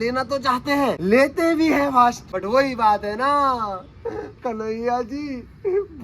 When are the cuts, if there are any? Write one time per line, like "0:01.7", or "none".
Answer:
0:01.0
0:02.3